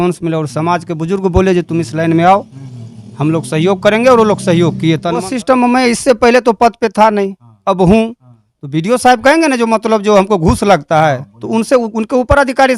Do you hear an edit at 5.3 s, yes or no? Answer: yes